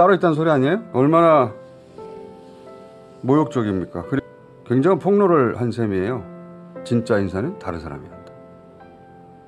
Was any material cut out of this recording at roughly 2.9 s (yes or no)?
no